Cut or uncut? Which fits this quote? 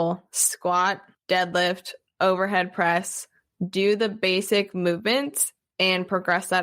cut